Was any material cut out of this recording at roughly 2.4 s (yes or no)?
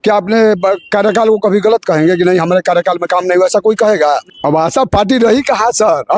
no